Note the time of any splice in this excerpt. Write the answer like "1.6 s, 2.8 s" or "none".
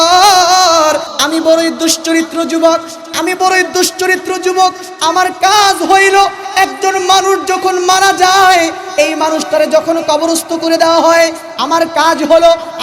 1.1 s